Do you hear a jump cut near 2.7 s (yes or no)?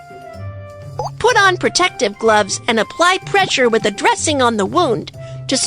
no